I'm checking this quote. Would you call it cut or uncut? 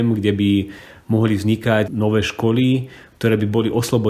cut